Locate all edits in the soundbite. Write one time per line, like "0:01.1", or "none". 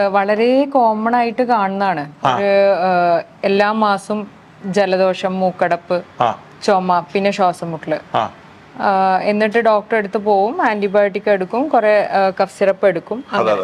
none